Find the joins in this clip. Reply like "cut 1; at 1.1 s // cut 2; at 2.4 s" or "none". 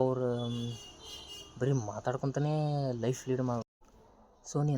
cut 1; at 3.7 s